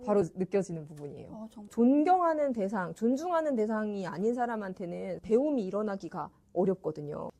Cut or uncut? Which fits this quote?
cut